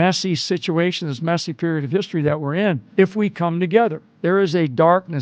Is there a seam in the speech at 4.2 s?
yes; 2 cuts; at 2.9 s, 4.2 s

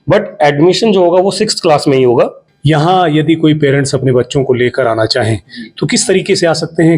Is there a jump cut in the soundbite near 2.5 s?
yes; 1 cut; at 2.5 s

